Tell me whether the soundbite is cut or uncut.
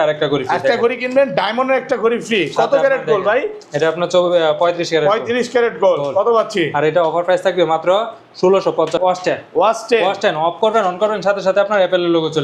cut